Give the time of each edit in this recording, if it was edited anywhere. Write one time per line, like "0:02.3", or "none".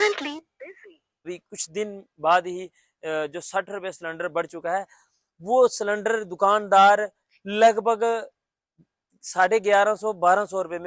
0:01.3